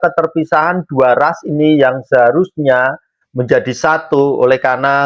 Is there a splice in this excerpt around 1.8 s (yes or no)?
no